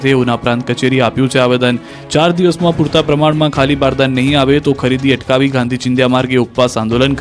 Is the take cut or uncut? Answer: cut